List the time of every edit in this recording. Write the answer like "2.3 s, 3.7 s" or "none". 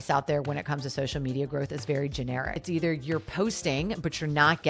2.6 s